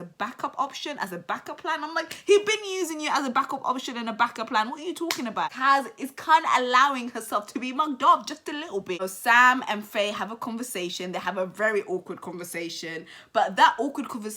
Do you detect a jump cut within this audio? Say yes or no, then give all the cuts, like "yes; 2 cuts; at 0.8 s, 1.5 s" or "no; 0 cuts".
yes; 2 cuts; at 5.5 s, 9.0 s